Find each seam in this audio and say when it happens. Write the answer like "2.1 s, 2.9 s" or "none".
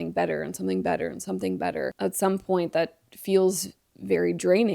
1.9 s